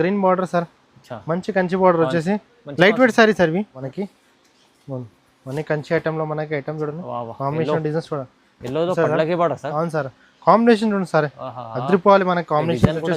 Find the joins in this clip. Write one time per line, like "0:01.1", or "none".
0:03.8

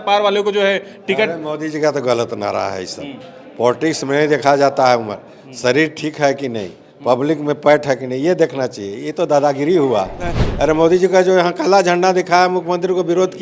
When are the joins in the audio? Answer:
0:10.4

